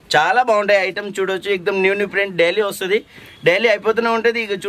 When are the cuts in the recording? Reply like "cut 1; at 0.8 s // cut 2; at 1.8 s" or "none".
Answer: none